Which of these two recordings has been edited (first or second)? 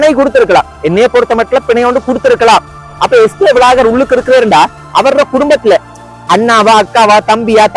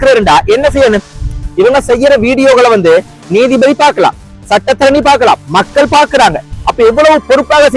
first